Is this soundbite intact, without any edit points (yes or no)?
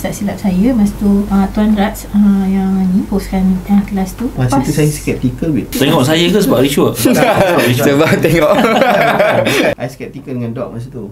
no